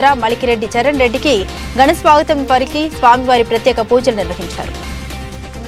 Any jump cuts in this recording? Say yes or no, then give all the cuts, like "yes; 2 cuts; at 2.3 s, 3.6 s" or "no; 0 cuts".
no; 0 cuts